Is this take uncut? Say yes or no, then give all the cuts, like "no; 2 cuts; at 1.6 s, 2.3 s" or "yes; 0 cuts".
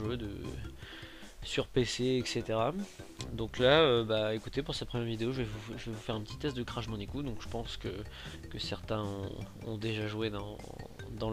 yes; 0 cuts